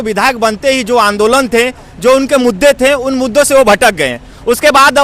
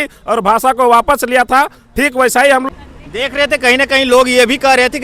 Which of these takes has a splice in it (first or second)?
second